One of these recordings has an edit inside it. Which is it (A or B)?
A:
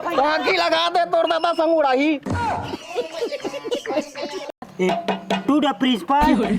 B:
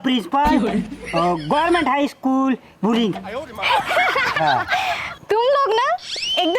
A